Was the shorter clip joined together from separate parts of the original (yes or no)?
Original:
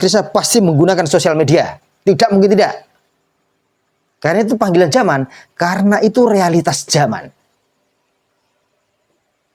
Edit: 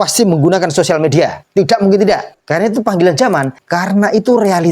yes